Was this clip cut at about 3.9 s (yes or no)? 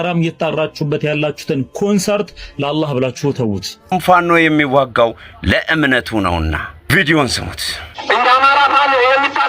yes